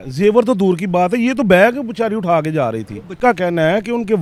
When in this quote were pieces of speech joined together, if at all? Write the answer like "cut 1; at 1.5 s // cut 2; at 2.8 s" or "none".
none